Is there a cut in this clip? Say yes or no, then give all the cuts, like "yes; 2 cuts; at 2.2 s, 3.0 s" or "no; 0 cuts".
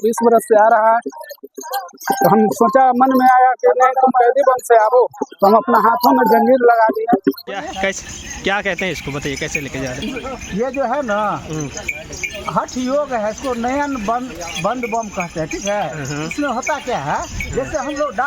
yes; 1 cut; at 7.4 s